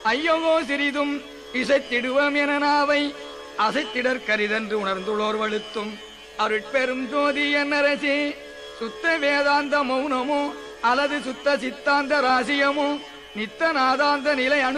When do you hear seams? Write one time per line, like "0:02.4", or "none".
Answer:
0:04.0